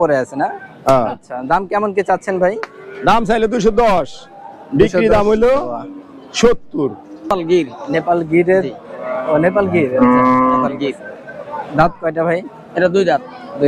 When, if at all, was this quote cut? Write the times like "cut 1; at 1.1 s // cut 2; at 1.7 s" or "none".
cut 1; at 7.3 s

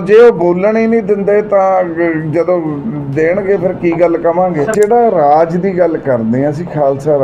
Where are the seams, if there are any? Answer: cut 1; at 4.7 s

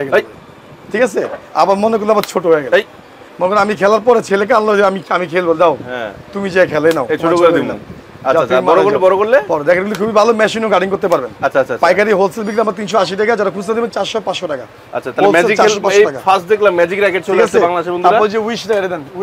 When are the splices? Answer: none

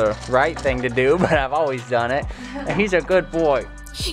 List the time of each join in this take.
none

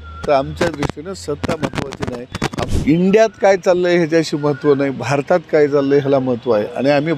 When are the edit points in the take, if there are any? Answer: cut 1; at 2.7 s

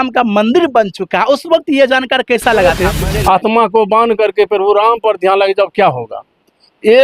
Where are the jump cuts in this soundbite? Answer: cut 1; at 2.7 s

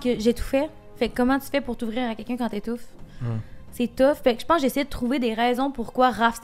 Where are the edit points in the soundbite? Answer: none

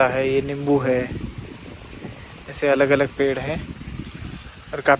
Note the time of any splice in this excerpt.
none

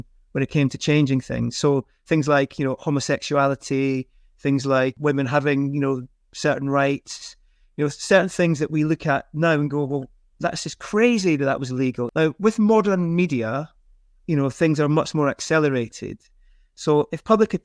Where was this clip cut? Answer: cut 1; at 5.0 s // cut 2; at 12.0 s // cut 3; at 15.1 s

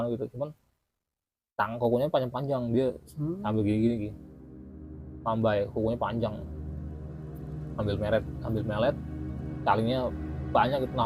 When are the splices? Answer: none

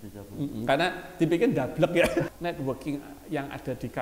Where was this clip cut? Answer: cut 1; at 2.3 s

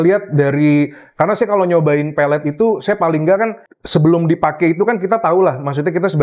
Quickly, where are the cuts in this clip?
none

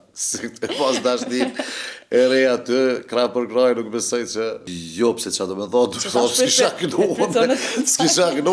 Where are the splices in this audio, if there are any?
cut 1; at 4.7 s

